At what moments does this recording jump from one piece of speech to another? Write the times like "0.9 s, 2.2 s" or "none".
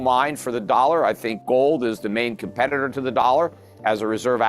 1.3 s